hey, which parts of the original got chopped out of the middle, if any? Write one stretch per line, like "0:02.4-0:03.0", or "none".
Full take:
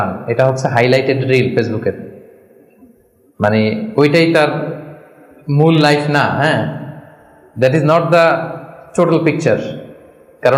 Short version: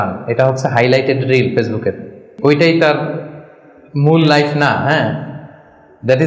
0:02.3-0:03.8